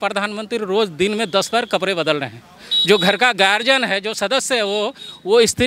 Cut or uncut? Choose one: uncut